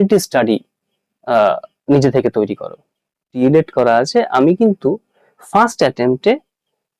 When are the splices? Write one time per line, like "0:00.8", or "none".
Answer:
0:03.3